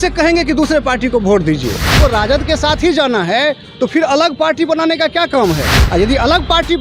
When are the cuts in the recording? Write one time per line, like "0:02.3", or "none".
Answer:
0:01.9